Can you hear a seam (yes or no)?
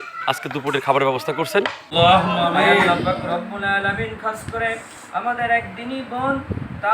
yes